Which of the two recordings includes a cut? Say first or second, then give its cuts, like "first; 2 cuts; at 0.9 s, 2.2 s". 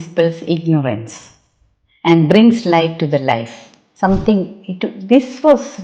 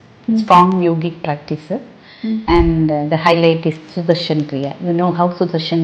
first; 1 cut; at 3.8 s